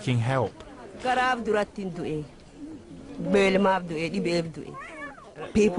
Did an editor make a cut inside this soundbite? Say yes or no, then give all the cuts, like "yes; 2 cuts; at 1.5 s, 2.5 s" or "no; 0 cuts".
no; 0 cuts